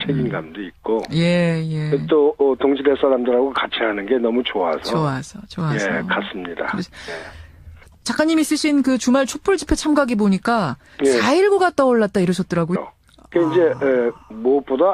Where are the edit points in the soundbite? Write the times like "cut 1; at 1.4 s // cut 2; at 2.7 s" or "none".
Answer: none